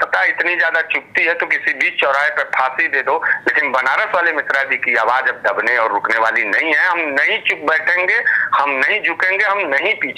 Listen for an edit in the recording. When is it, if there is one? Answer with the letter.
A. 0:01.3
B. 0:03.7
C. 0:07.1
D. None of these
D